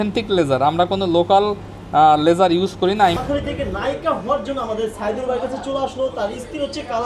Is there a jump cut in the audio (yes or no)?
yes